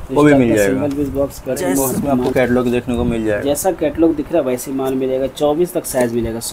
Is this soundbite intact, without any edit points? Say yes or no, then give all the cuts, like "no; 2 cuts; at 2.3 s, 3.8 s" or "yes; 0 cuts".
no; 1 cut; at 2.1 s